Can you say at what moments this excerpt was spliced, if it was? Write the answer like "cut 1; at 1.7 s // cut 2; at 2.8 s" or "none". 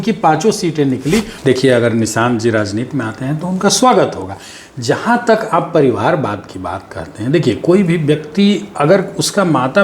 cut 1; at 1.3 s